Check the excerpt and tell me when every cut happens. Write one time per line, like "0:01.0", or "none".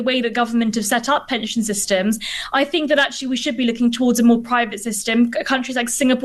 none